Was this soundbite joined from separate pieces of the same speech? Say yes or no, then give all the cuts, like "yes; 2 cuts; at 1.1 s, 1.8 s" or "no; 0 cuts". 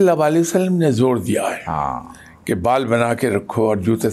no; 0 cuts